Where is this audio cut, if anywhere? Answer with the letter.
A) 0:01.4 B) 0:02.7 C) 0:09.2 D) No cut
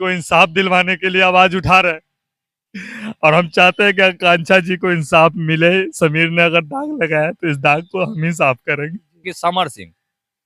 C